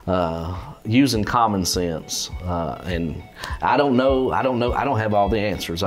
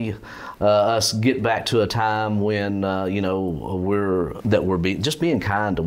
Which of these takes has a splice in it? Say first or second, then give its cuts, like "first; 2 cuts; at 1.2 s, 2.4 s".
second; 1 cut; at 4.4 s